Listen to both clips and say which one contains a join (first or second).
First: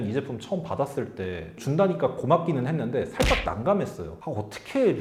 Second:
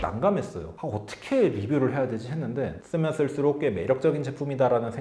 second